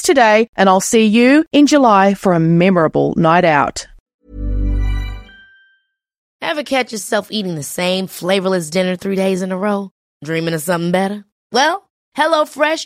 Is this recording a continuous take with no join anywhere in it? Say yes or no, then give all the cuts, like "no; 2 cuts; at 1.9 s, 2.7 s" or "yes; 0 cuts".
no; 2 cuts; at 4.2 s, 6.1 s